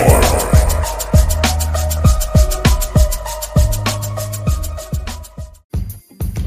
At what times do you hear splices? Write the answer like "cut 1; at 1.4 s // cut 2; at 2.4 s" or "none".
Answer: cut 1; at 5.5 s